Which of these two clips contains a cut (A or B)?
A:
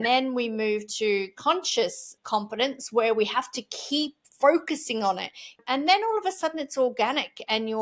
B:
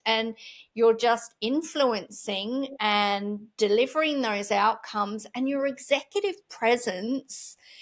A